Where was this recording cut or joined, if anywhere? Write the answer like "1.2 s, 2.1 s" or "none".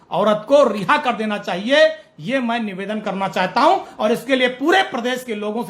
none